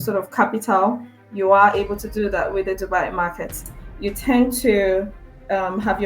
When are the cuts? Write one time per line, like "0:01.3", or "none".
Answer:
0:03.6